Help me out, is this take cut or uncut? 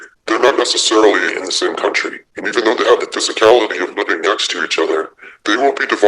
uncut